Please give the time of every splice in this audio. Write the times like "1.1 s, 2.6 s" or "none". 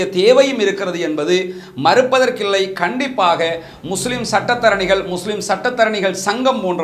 none